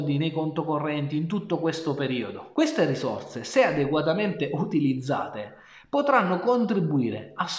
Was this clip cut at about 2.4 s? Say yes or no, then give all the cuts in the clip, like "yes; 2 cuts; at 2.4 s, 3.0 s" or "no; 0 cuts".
yes; 1 cut; at 2.4 s